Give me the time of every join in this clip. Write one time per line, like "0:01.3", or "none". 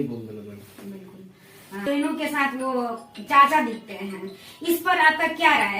0:01.9